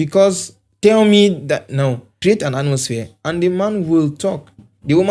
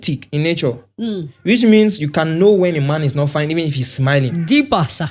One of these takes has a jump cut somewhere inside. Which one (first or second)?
first